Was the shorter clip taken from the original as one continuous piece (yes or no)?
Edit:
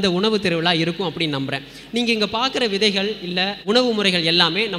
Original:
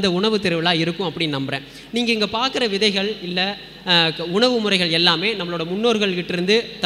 no